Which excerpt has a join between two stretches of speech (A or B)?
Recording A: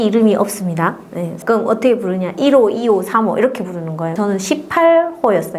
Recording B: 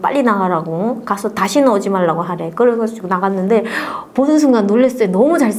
A